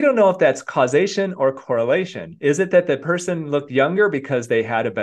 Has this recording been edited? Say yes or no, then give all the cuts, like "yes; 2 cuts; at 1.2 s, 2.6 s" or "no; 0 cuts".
no; 0 cuts